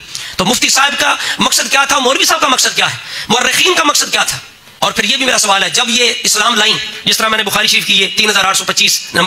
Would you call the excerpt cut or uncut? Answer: cut